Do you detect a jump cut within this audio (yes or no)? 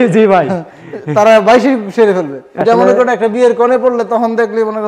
yes